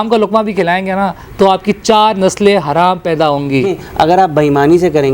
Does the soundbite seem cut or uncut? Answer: cut